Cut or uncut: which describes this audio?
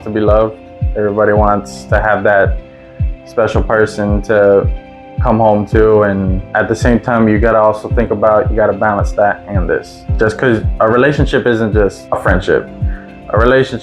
cut